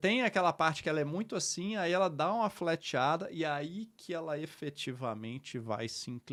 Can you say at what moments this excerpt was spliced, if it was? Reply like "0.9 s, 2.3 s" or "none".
none